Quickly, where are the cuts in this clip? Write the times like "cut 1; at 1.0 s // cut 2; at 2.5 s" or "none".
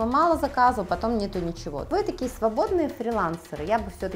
cut 1; at 1.9 s